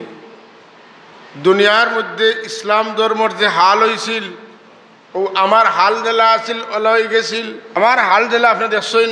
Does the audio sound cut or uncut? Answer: cut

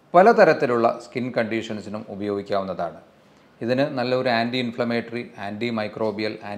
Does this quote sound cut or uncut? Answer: uncut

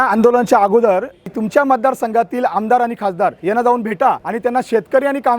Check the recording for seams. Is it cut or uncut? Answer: cut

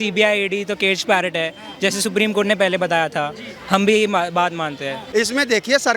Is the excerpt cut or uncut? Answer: cut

